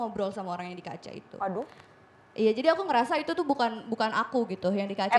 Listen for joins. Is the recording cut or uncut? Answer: uncut